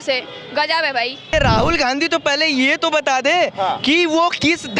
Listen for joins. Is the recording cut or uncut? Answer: cut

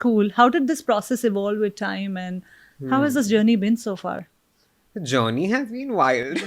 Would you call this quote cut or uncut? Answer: uncut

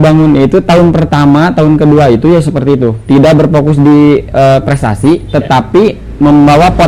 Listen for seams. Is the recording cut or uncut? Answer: uncut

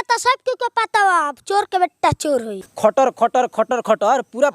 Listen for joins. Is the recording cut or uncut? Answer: cut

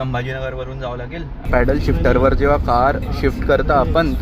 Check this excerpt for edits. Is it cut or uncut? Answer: cut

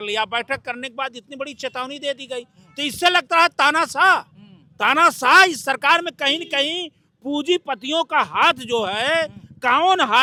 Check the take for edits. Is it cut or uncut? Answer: uncut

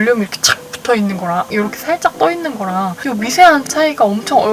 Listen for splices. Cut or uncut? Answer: cut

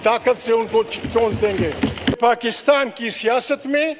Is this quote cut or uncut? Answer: cut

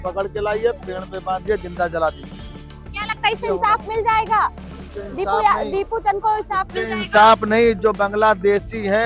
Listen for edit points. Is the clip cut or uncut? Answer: uncut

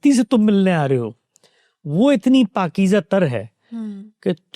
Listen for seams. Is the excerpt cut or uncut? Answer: uncut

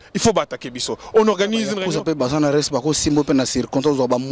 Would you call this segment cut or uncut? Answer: cut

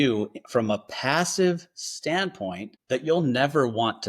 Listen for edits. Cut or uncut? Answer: cut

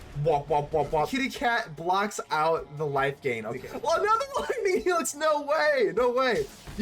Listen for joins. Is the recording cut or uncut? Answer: cut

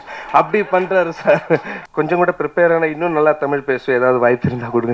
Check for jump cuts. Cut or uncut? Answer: cut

